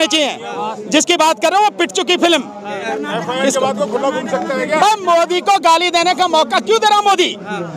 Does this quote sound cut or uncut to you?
cut